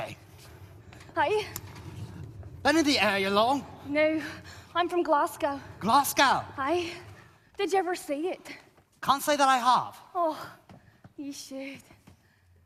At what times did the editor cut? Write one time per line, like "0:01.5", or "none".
none

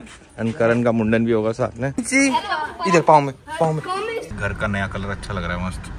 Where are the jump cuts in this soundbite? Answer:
0:02.0
0:04.3

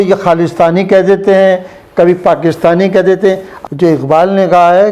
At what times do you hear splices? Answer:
0:03.5

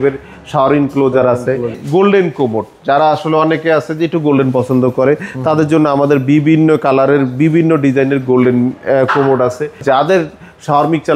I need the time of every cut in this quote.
0:01.8
0:09.8

